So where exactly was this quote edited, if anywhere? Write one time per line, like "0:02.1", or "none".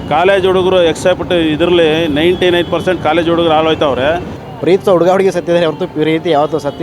0:04.3

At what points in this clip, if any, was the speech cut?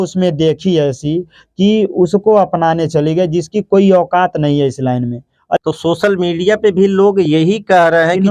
0:05.6

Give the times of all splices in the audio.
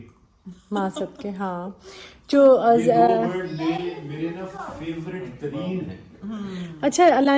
none

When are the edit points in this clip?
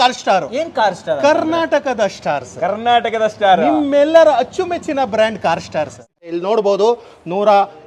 0:06.1

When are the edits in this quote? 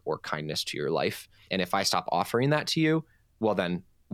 0:01.3
0:03.2

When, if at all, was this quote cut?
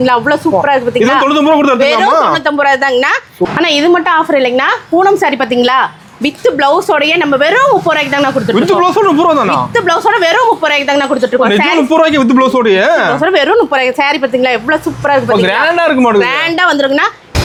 none

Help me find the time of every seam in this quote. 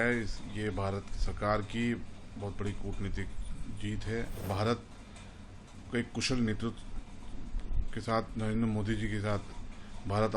0:04.5

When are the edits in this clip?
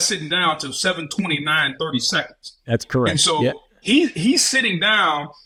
none

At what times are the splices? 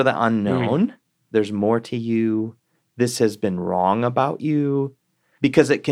0:01.2

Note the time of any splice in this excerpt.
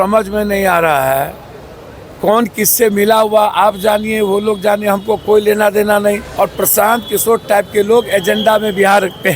0:06.3

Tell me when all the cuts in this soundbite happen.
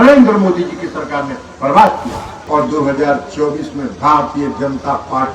0:02.4

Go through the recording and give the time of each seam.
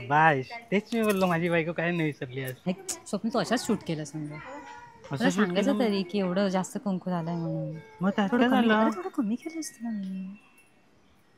0:02.5

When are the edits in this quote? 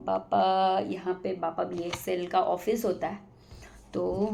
none

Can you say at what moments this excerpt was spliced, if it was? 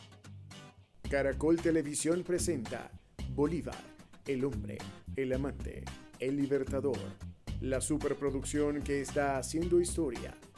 0:01.1

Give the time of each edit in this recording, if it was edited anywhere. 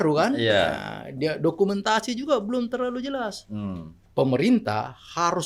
0:04.0

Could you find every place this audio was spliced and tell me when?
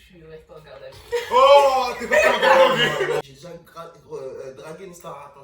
0:03.2

